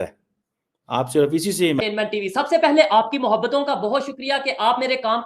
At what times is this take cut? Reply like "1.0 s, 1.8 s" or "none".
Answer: 1.8 s